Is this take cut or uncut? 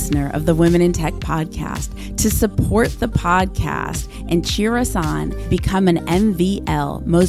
uncut